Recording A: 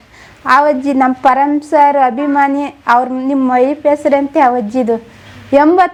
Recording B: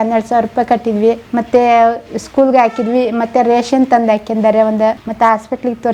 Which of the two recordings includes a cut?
B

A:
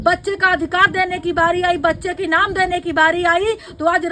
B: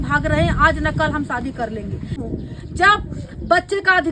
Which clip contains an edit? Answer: B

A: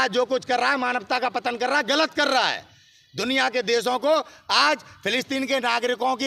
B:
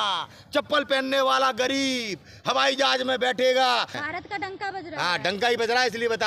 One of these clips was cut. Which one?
B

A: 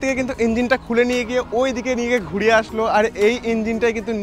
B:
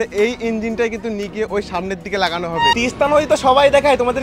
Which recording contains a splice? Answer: B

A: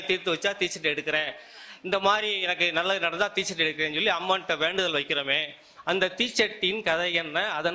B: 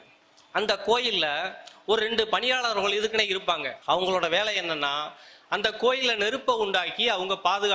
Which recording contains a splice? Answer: B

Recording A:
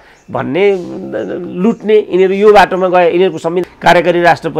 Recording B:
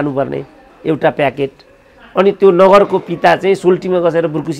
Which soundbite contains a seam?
A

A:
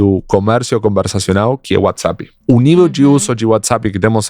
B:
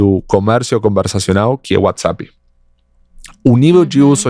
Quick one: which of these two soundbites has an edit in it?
A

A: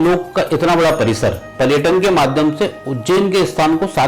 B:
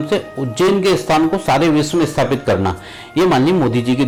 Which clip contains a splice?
A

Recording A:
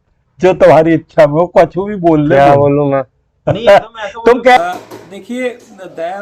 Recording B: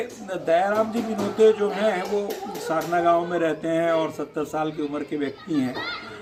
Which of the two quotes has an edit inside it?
A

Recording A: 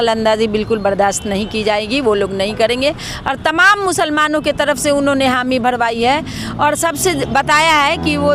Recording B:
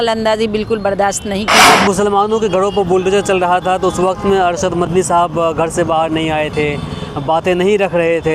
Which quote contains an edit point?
B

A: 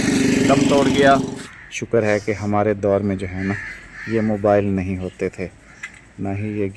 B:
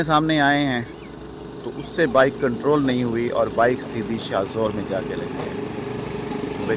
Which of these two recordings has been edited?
A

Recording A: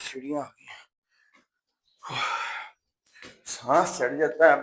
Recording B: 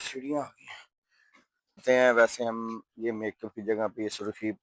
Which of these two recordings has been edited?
B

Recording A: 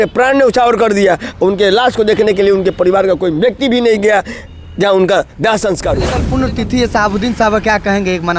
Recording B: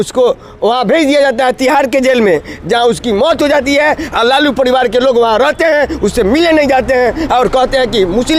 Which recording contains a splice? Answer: A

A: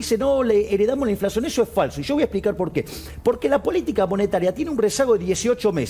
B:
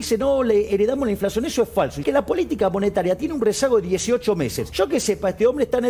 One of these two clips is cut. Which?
B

